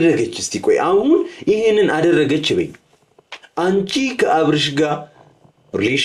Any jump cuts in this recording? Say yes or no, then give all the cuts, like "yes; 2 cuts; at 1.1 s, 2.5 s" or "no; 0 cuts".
no; 0 cuts